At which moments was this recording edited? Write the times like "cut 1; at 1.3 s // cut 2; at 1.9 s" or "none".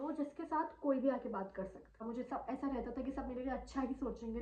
cut 1; at 2.0 s